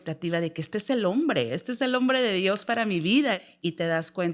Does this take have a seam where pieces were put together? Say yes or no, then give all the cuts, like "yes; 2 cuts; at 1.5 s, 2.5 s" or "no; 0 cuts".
yes; 1 cut; at 3.4 s